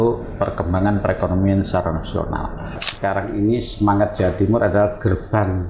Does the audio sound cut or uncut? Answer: cut